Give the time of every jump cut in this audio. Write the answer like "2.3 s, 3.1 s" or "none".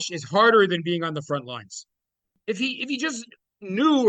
2.3 s